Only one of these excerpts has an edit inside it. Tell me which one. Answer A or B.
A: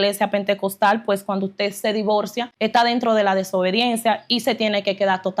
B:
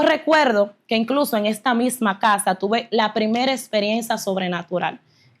A